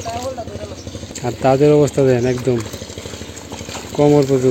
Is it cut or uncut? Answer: cut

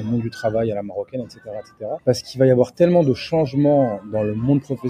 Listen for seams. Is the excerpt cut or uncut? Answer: cut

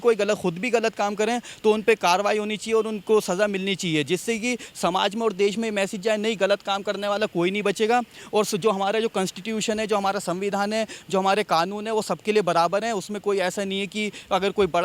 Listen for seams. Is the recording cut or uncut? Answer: uncut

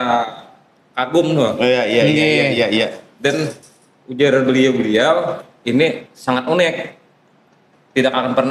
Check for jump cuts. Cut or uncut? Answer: uncut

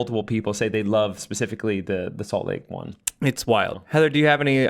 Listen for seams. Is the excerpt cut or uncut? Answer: cut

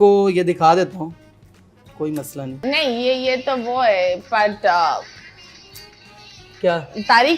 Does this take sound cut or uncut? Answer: cut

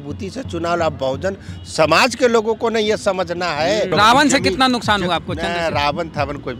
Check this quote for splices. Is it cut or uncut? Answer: cut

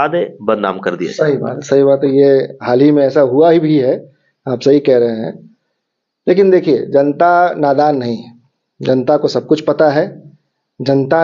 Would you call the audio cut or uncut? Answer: uncut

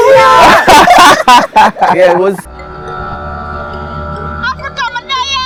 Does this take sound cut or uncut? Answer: uncut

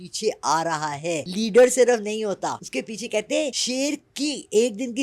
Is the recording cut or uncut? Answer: cut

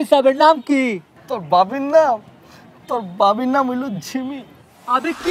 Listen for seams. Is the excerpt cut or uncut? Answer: uncut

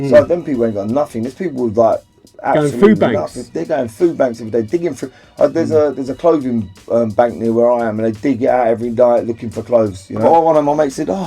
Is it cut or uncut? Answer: cut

